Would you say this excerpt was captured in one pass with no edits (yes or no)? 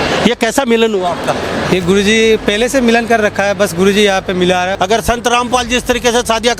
no